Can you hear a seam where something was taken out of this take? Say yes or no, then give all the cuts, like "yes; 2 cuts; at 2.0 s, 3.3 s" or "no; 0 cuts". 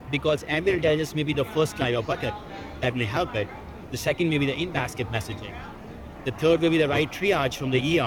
no; 0 cuts